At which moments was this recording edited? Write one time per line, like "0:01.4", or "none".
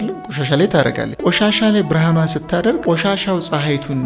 0:01.1
0:02.8